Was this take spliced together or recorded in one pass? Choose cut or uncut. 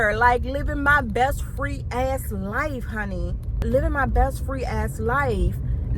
uncut